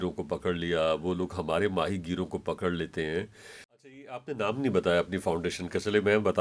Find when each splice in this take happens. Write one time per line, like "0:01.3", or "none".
0:03.8